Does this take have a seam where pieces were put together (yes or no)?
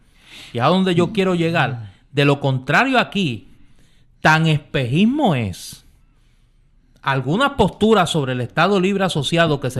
yes